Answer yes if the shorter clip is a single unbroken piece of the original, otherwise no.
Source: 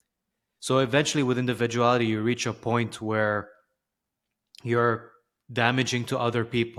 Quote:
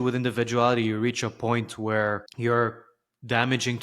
no